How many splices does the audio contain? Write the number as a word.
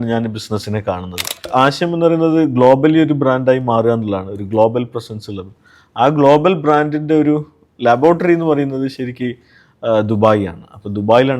one